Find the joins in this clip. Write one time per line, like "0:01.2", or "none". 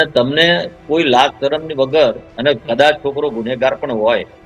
0:02.3